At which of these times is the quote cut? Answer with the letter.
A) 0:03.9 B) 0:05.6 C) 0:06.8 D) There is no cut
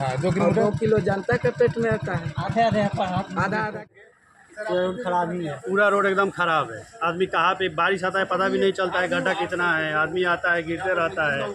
A